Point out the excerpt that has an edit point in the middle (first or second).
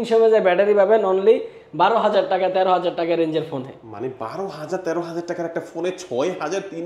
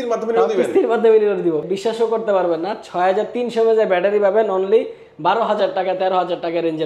second